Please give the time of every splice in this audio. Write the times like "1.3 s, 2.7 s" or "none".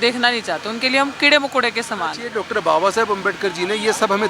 2.3 s